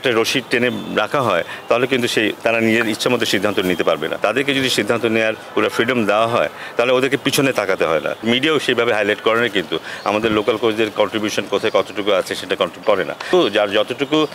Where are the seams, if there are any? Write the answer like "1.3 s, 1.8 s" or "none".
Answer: 4.1 s, 8.2 s, 13.3 s